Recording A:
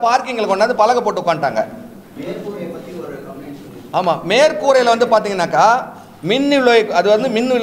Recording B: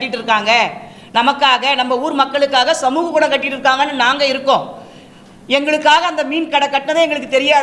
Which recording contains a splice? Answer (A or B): A